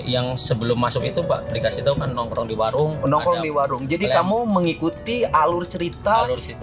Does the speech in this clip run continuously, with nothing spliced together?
yes; 0 cuts

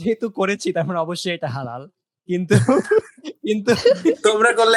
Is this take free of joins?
yes; 0 cuts

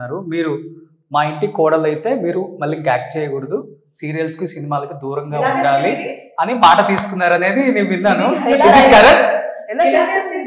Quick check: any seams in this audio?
no; 0 cuts

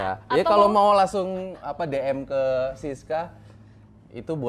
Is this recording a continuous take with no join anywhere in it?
yes; 0 cuts

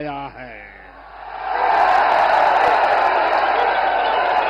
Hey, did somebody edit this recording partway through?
no; 0 cuts

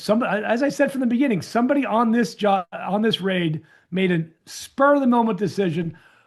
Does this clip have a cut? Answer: no; 0 cuts

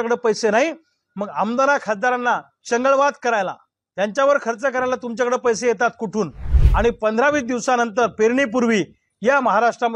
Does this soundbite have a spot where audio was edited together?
yes; 1 cut; at 6.6 s

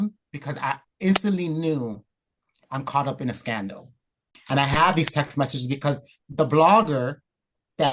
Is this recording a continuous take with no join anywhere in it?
no; 1 cut; at 4.3 s

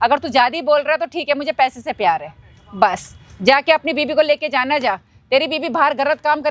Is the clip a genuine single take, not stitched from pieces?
yes; 0 cuts

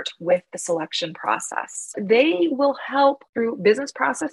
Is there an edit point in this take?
yes; 2 cuts; at 1.9 s, 3.2 s

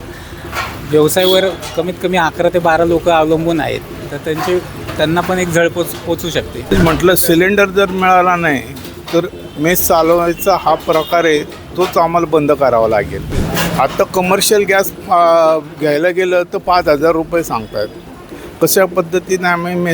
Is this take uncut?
no; 2 cuts; at 6.6 s, 13.4 s

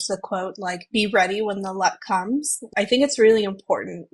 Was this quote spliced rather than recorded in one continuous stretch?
yes; 1 cut; at 2.6 s

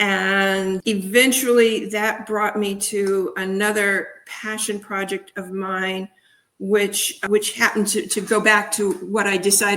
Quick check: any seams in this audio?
yes; 2 cuts; at 0.8 s, 7.2 s

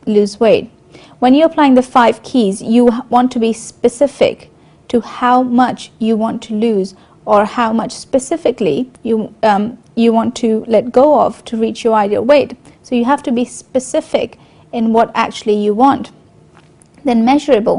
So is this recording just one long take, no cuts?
no; 1 cut; at 3.9 s

